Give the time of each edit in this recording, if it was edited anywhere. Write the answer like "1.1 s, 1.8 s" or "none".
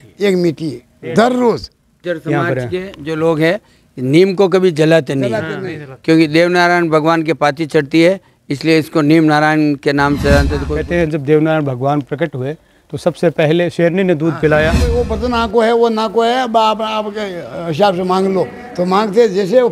2.0 s, 10.6 s, 15.1 s